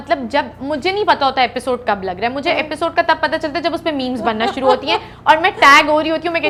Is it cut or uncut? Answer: uncut